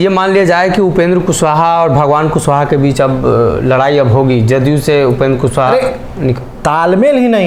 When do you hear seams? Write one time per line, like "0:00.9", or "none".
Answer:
none